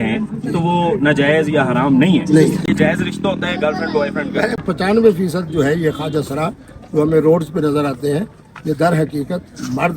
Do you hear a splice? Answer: yes; 2 cuts; at 2.6 s, 4.5 s

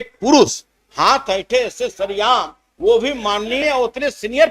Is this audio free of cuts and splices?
yes; 0 cuts

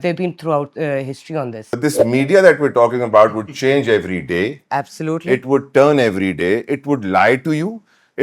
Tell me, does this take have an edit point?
yes; 1 cut; at 1.7 s

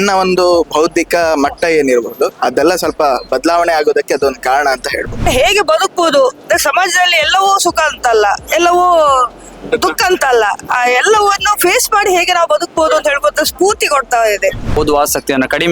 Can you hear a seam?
yes; 2 cuts; at 5.2 s, 14.8 s

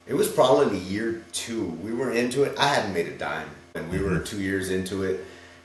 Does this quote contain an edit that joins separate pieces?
no; 0 cuts

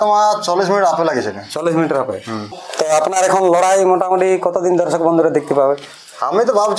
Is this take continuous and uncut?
no; 1 cut; at 2.6 s

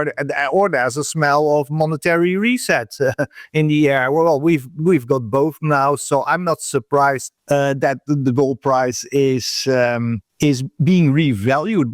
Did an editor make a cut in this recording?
yes; 2 cuts; at 7.3 s, 10.2 s

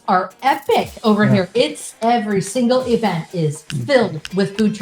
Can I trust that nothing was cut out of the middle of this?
no; 2 cuts; at 1.9 s, 3.7 s

